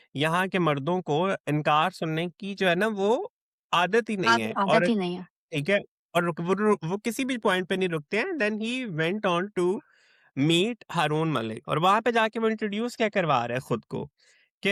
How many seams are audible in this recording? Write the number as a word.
zero